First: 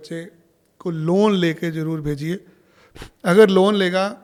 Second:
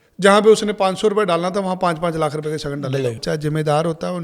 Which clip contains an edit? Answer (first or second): second